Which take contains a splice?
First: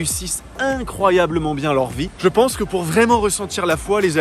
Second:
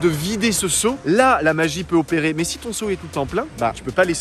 first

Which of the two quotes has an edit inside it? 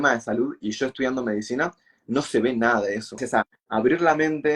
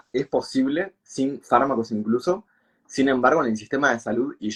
first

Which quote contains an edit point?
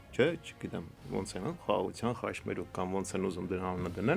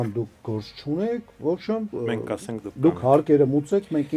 first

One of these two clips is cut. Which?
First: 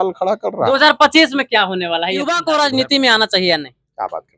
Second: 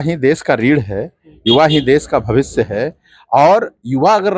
first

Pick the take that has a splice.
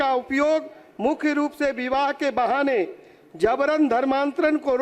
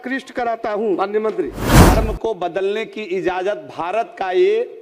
second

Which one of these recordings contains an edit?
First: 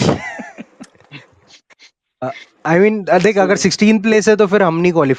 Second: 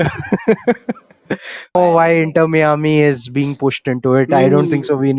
second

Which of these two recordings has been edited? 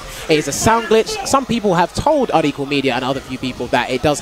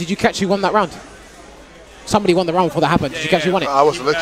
first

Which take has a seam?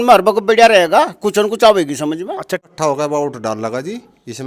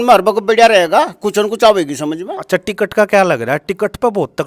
first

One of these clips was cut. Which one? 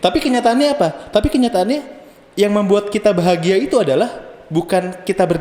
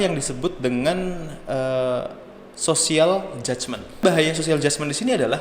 second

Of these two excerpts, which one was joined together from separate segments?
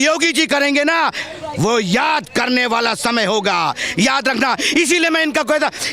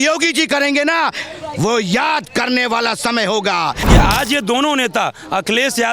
second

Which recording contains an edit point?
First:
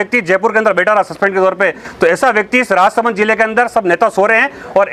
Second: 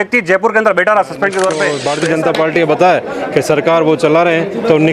second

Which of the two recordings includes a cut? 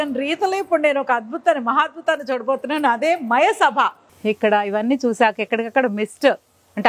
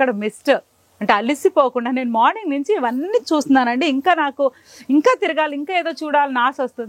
first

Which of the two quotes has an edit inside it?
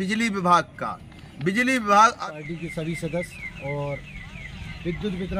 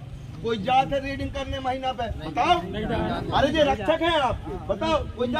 first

